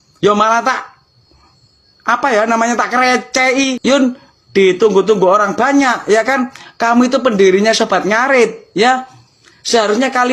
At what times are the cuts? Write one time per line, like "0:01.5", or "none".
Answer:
0:03.8